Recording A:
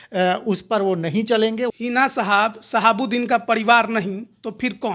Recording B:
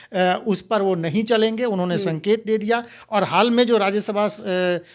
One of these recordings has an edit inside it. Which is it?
A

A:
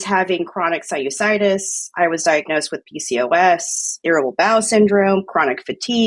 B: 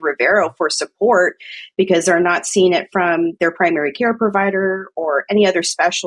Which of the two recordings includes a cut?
A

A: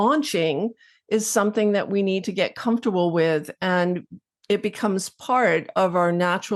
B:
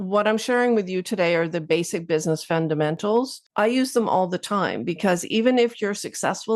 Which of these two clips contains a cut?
B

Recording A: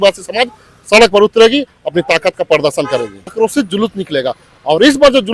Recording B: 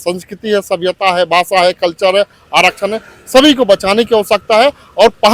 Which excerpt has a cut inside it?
A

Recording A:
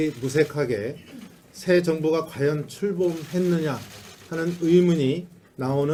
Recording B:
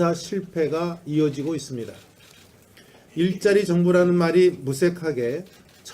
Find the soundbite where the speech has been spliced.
B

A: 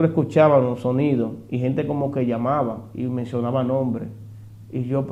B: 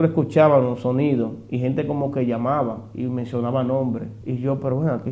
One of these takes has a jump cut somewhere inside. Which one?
B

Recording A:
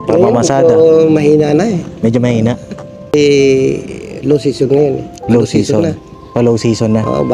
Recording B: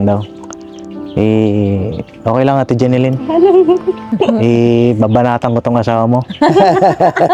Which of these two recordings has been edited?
A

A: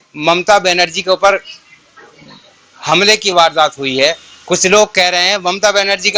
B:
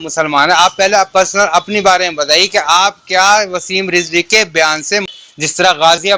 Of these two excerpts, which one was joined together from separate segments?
B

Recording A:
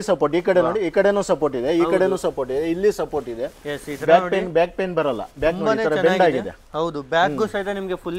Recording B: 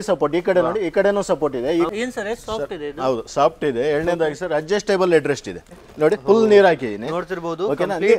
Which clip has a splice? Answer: B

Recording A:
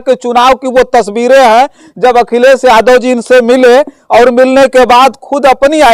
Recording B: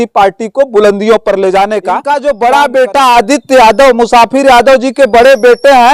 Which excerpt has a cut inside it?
B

